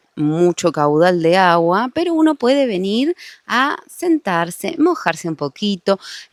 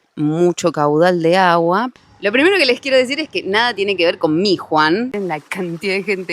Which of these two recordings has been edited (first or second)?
second